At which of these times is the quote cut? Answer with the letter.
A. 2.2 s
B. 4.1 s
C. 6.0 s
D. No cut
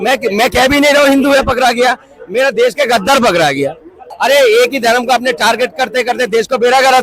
B